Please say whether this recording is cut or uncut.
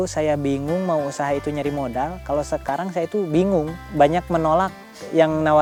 uncut